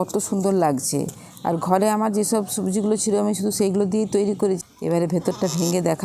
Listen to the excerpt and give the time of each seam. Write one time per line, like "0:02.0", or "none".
0:04.6